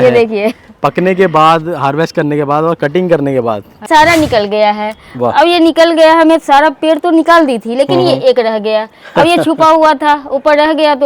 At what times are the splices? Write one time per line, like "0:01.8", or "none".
0:03.9